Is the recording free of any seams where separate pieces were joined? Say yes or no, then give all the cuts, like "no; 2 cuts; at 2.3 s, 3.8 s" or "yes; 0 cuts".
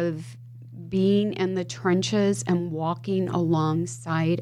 yes; 0 cuts